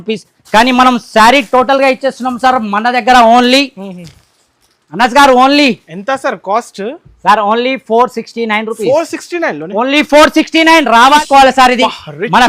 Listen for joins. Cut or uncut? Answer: cut